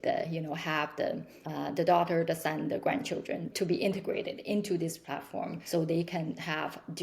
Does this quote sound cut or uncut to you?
cut